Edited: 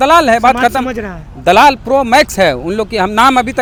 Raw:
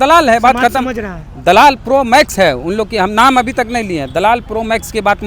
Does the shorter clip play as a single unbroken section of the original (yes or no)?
yes